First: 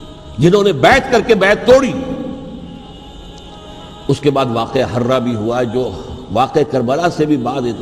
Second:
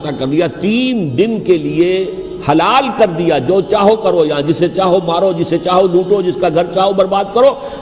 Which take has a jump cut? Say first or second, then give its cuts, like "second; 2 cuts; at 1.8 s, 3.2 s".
first; 1 cut; at 2.9 s